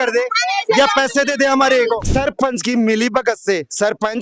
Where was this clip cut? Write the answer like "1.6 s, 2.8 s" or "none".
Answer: 2.1 s